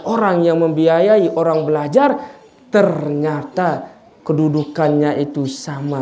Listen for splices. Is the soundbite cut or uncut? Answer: uncut